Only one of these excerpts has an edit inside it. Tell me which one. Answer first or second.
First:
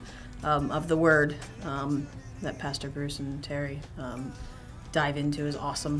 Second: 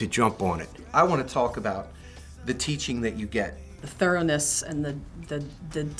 second